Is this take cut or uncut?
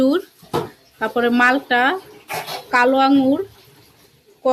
uncut